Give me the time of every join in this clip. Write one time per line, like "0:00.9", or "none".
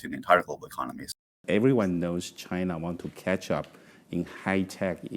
0:01.4

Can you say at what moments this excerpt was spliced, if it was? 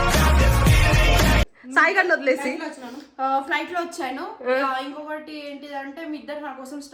none

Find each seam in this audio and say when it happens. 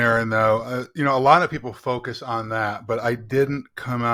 none

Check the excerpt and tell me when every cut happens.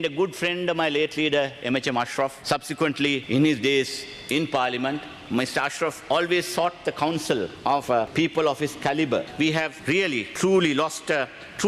0:03.2
0:05.1
0:07.8
0:09.8

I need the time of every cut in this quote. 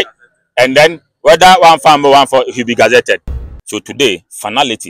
0:03.4

